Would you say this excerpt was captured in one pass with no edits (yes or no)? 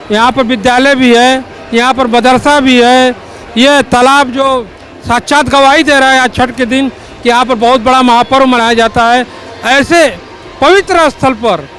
yes